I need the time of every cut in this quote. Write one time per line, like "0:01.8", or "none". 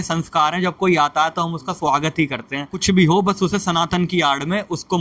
0:02.8